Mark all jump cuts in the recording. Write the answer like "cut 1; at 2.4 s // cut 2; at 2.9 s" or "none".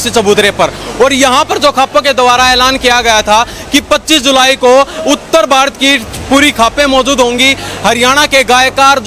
none